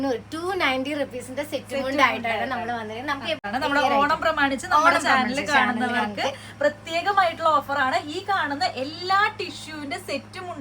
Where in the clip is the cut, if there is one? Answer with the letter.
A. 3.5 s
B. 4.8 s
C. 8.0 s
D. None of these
A